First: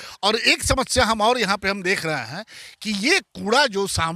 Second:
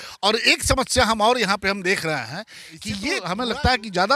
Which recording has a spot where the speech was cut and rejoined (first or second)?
second